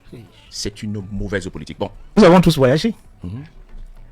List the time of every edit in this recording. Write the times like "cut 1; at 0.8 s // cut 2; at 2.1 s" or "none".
cut 1; at 2.2 s